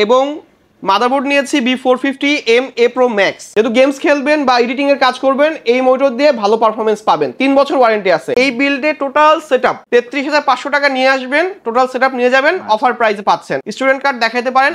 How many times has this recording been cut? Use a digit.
4